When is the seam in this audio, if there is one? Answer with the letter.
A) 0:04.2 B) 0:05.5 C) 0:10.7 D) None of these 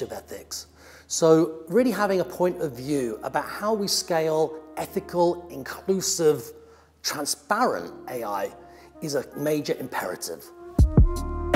C